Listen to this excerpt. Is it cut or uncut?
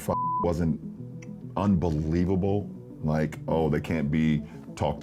uncut